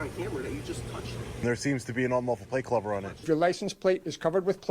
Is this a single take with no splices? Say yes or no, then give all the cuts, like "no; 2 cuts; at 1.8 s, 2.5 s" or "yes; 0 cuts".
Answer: no; 2 cuts; at 1.4 s, 3.1 s